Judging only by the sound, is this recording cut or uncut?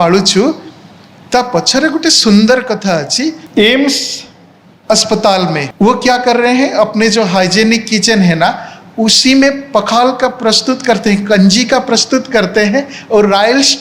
cut